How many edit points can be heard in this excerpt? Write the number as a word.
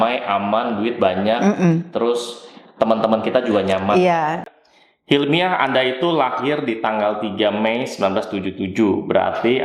one